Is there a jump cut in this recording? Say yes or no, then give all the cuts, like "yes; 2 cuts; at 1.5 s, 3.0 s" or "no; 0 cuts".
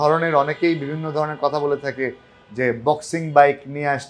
no; 0 cuts